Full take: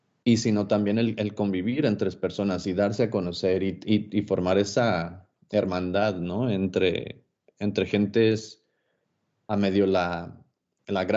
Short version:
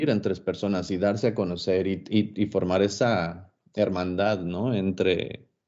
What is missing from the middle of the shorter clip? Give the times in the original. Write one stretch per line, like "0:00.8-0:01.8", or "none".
none